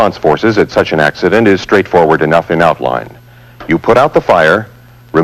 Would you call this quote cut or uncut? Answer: uncut